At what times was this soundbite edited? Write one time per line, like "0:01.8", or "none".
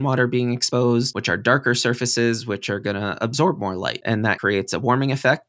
0:00.7
0:04.3